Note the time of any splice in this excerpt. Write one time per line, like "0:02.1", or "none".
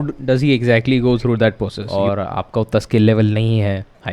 0:01.8